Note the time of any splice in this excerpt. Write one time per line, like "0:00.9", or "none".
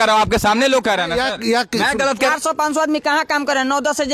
0:02.3